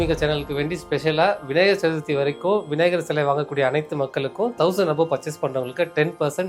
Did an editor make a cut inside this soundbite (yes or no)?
no